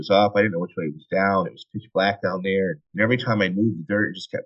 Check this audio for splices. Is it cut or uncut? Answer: cut